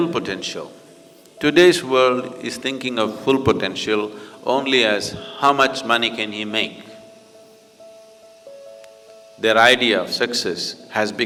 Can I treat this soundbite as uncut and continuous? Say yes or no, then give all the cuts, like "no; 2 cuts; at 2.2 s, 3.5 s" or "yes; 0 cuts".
yes; 0 cuts